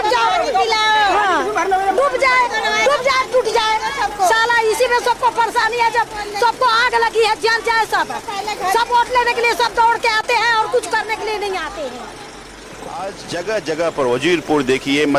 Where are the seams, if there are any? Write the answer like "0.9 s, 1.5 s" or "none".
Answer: 12.2 s